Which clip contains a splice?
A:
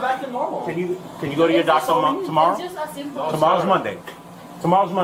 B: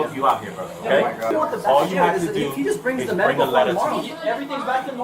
B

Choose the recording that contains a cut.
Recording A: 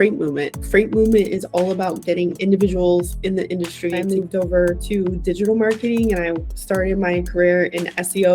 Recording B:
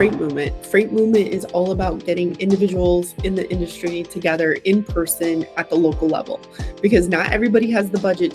A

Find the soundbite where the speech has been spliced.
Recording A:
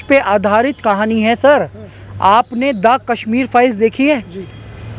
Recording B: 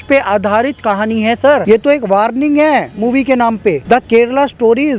B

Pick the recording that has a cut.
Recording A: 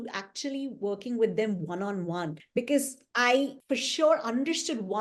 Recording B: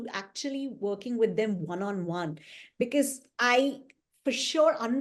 A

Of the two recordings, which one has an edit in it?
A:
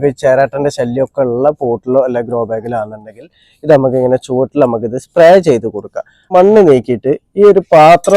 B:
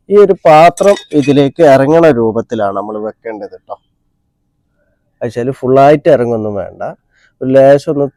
A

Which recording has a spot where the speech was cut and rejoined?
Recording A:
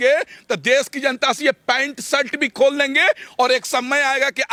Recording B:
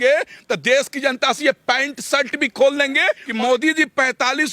B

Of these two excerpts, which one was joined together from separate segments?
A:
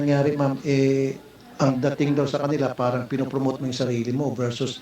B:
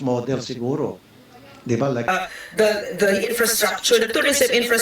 B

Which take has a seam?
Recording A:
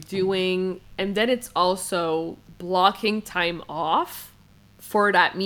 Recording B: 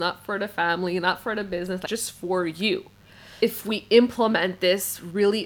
B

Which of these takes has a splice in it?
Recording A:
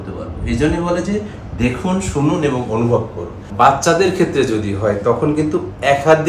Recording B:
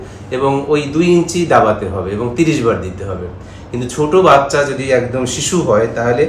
A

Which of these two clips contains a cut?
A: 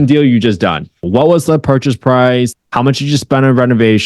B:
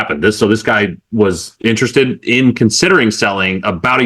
A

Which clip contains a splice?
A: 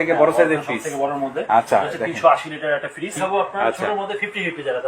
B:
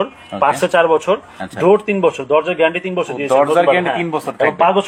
A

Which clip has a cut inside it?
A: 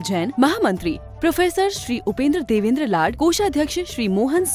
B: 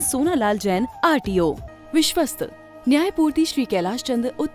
B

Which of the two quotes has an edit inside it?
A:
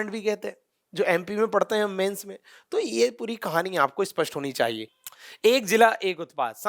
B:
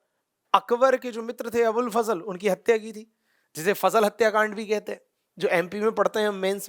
A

